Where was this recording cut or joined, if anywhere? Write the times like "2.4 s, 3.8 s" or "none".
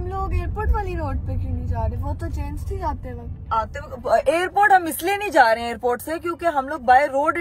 none